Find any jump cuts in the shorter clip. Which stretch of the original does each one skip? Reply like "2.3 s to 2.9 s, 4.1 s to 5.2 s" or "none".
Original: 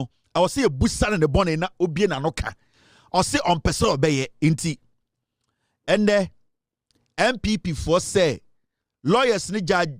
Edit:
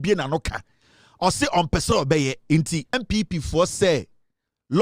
4.9 s to 7.3 s

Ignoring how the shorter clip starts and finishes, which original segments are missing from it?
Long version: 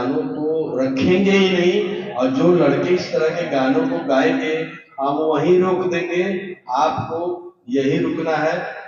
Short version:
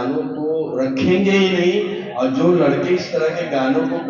none

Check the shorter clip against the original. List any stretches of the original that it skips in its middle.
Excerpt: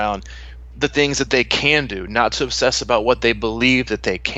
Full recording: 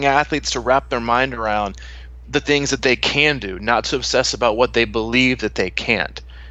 none

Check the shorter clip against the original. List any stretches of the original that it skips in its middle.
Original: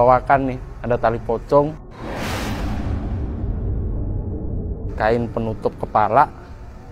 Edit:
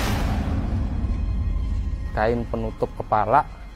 4.2 s to 4.7 s

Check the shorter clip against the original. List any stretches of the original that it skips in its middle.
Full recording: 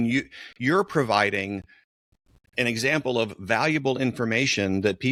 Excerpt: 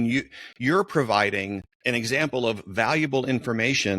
1.7 s to 2.4 s

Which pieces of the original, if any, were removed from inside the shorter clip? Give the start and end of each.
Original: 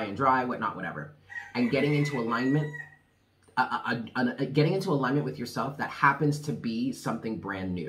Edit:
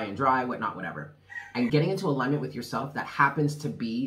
1.7 s to 4.5 s

